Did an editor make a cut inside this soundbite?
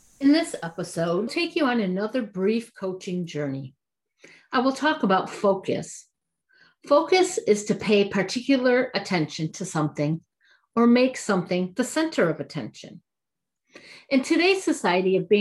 yes; 1 cut; at 1.3 s

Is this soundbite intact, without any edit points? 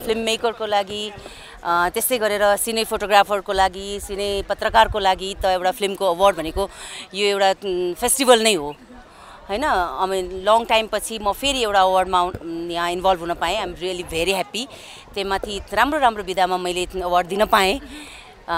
yes; 0 cuts

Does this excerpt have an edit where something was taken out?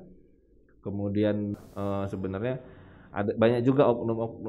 yes; 1 cut; at 1.6 s

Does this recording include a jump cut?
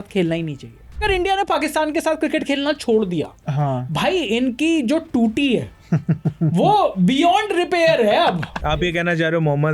yes; 2 cuts; at 1.0 s, 8.6 s

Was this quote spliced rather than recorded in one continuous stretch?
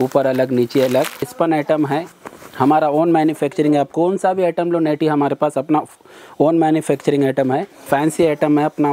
yes; 2 cuts; at 1.3 s, 7.9 s

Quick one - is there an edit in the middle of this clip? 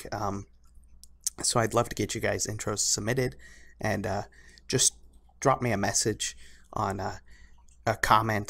yes; 1 cut; at 6.2 s

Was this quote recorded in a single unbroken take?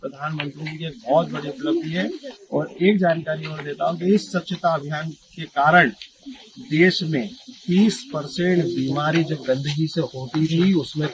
yes; 0 cuts

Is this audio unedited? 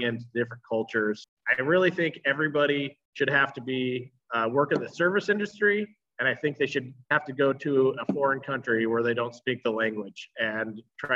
no; 2 cuts; at 1.3 s, 3.0 s

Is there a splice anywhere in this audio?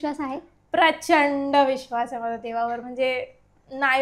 no; 0 cuts

